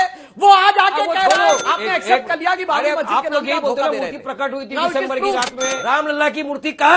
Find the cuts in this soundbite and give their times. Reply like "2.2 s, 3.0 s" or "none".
1.7 s, 5.7 s